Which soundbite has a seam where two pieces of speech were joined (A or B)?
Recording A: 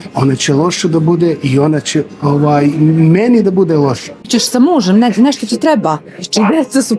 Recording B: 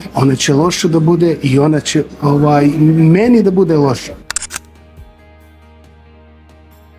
A